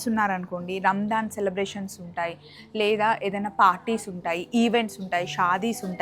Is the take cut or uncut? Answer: uncut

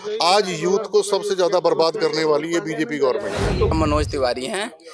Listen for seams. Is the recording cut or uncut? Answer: cut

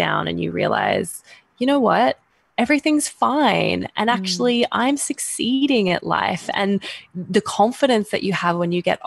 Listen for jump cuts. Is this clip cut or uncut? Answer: uncut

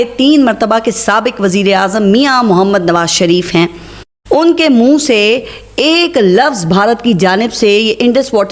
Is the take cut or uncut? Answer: uncut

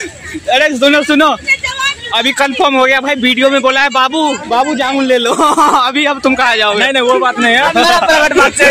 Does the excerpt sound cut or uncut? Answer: cut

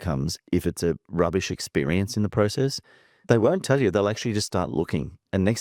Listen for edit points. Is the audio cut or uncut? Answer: uncut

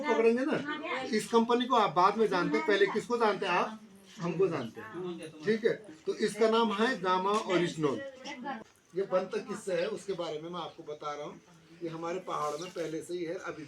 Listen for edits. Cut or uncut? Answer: cut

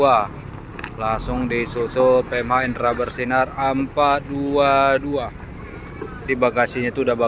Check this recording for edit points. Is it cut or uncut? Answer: cut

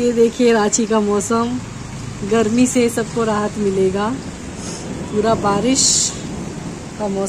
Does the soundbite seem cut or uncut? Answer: uncut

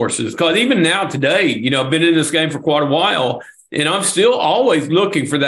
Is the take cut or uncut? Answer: uncut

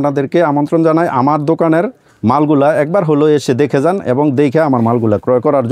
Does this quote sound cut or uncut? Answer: uncut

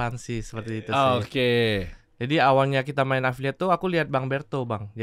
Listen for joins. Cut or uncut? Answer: uncut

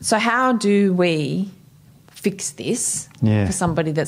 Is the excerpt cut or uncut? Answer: uncut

